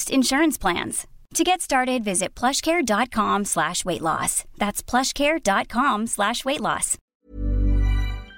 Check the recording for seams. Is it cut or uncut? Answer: cut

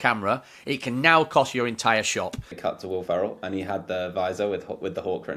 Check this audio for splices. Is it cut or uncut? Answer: cut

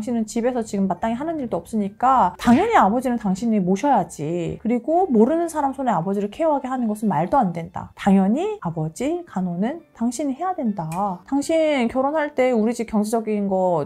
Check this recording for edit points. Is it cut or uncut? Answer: uncut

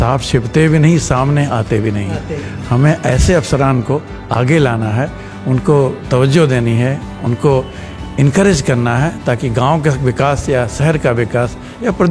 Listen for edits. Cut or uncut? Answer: uncut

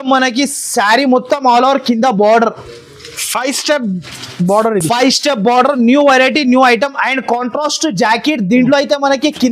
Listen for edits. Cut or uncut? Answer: uncut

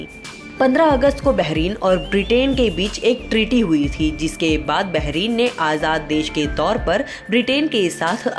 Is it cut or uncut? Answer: uncut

